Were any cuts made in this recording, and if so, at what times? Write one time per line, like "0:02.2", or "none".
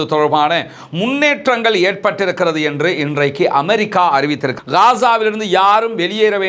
0:04.5